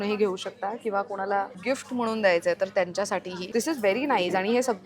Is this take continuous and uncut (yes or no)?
no